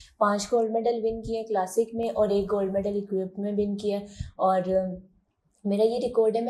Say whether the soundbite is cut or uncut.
uncut